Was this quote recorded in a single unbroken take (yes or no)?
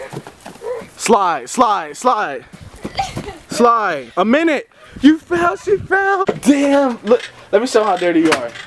no